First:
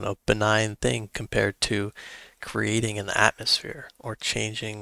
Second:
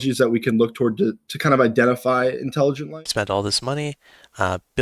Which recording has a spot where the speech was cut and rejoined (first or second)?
second